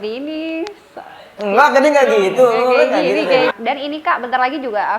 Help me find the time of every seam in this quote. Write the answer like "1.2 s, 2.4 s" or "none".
3.5 s